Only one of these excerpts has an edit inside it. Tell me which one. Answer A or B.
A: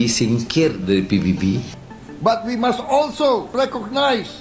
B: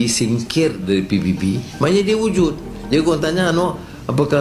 A